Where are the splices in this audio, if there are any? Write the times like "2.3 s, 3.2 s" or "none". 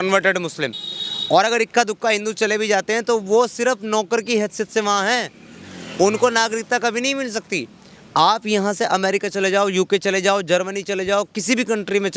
none